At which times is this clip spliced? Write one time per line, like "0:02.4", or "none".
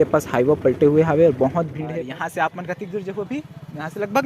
0:01.8